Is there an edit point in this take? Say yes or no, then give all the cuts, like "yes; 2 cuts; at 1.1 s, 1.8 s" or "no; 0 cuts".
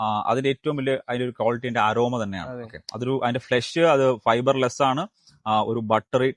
no; 0 cuts